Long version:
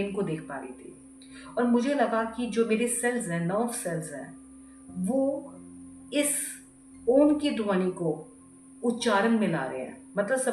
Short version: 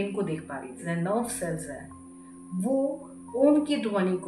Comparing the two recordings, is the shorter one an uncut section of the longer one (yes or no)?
no